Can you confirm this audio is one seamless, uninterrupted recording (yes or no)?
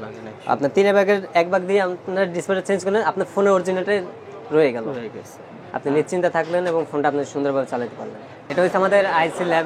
yes